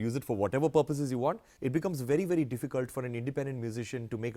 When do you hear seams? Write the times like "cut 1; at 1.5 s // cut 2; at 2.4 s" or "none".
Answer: cut 1; at 1.5 s